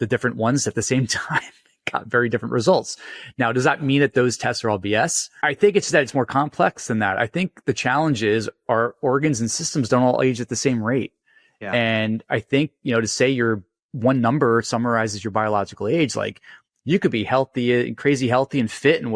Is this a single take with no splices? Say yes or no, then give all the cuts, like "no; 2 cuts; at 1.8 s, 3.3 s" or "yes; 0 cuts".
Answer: yes; 0 cuts